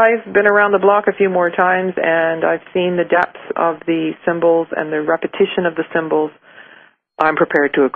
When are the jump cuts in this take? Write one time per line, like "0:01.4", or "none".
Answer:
none